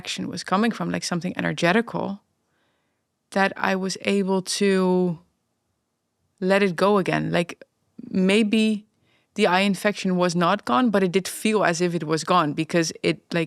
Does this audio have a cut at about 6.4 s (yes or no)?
no